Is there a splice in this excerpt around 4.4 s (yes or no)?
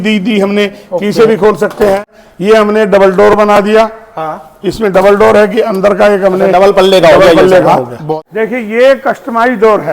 no